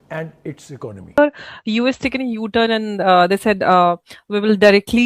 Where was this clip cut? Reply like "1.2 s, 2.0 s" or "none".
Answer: 1.1 s